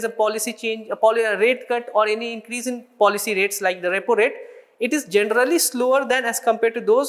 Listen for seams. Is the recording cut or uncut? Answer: uncut